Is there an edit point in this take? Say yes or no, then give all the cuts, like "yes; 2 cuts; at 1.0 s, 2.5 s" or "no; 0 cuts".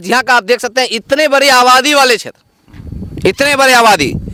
no; 0 cuts